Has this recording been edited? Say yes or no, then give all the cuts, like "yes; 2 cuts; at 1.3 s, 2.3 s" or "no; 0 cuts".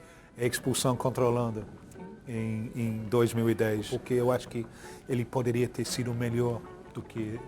yes; 1 cut; at 3.8 s